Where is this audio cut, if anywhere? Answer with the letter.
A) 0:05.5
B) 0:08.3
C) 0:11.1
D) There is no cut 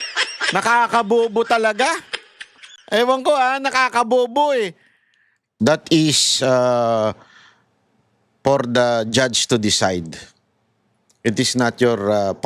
A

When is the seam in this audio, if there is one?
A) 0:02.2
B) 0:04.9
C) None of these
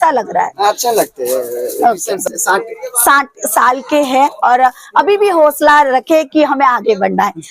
A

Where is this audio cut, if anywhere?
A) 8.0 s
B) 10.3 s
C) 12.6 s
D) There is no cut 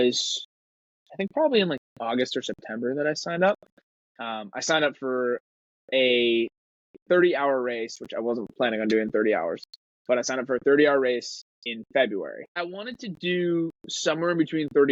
C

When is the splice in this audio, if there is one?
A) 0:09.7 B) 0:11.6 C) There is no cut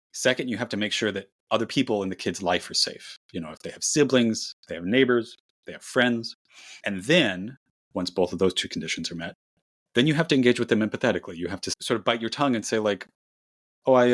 B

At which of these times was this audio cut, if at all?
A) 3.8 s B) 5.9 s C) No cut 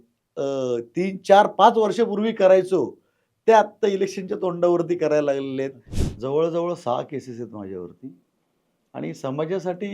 B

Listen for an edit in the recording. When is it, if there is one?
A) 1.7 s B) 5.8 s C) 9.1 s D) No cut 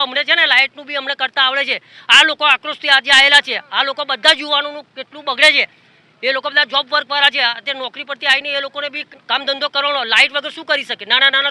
C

